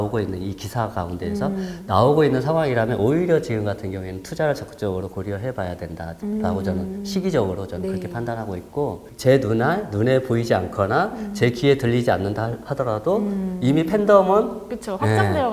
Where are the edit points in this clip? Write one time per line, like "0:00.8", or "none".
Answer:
0:09.1